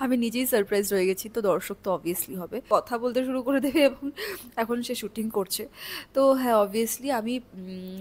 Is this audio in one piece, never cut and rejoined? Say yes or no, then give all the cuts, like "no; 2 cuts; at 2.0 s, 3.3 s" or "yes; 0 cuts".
no; 1 cut; at 2.7 s